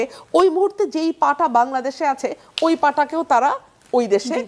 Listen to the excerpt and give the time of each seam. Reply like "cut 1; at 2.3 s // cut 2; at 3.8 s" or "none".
none

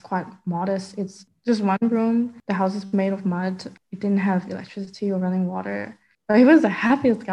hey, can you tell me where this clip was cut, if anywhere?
cut 1; at 1.3 s // cut 2; at 3.7 s

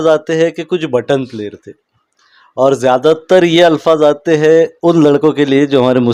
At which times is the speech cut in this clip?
none

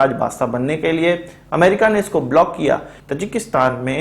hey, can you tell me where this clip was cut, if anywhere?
cut 1; at 3.0 s

